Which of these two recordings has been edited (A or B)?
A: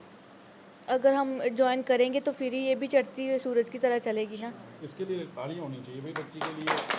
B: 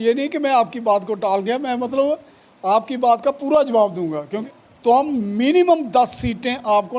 B